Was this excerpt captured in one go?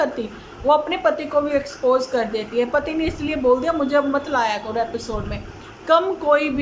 yes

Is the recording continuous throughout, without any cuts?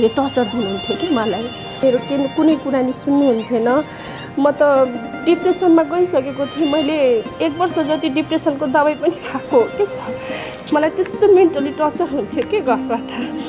no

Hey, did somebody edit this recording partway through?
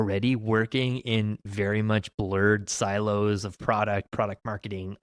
no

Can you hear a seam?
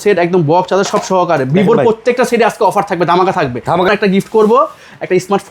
yes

